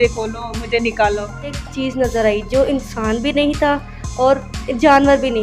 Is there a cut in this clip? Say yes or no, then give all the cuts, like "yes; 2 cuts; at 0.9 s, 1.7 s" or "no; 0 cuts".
yes; 1 cut; at 1.6 s